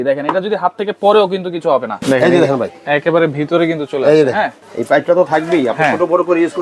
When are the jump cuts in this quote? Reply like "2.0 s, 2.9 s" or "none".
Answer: 1.9 s, 4.6 s